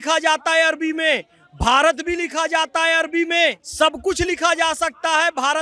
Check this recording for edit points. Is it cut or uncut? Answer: cut